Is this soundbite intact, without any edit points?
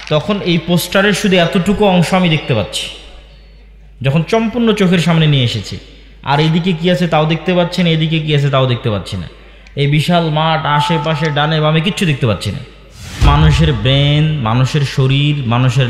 no; 1 cut; at 13.3 s

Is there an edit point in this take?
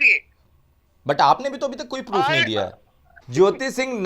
yes; 1 cut; at 3.2 s

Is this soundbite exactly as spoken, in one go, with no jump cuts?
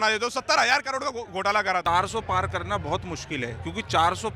no; 1 cut; at 1.8 s

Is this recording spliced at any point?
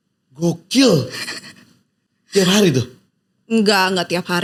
no; 0 cuts

